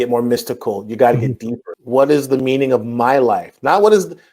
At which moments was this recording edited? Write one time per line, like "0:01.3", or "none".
0:01.7